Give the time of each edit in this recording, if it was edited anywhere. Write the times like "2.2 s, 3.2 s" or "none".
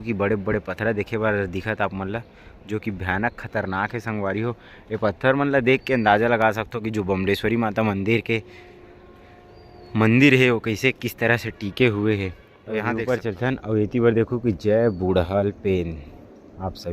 12.9 s